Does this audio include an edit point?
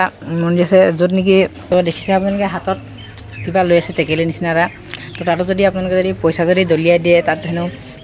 no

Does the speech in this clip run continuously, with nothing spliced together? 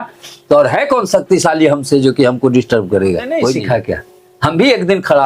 no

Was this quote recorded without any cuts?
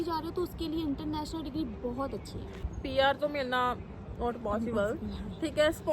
no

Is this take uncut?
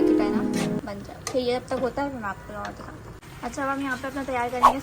yes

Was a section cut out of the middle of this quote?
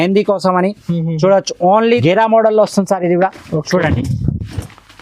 yes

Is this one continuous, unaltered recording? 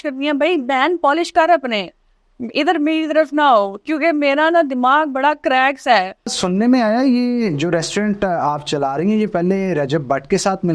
no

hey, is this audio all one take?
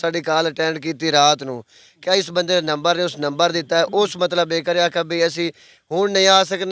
yes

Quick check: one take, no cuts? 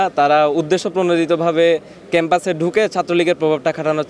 yes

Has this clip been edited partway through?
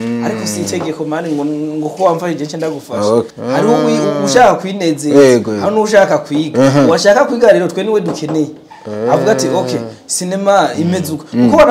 yes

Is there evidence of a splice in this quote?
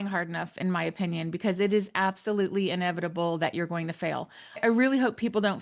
yes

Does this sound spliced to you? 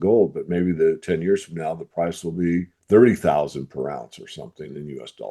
yes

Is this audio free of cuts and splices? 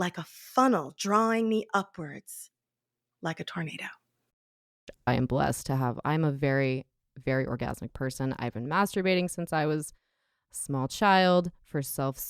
no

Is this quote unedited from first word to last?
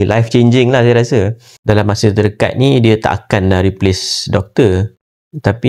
no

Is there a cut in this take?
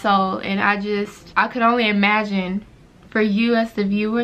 no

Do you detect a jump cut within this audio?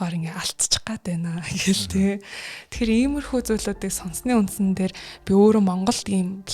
no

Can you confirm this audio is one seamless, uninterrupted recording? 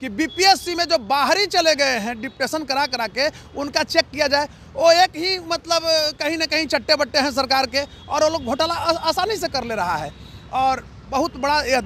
yes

